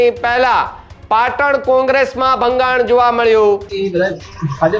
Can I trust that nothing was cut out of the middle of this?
no; 1 cut; at 3.7 s

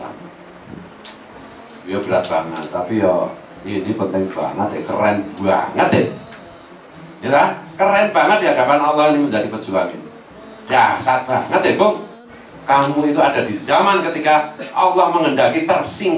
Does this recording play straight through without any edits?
no; 1 cut; at 12.5 s

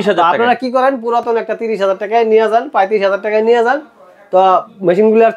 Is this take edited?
no; 0 cuts

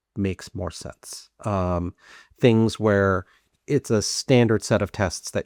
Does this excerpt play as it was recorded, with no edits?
yes; 0 cuts

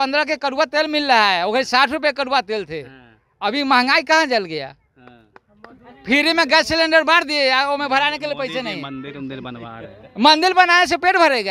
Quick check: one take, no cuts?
yes; 0 cuts

